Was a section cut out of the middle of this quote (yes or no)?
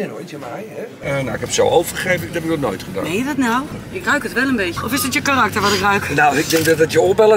yes